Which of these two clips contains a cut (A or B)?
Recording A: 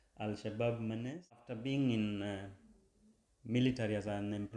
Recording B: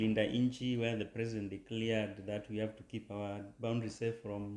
A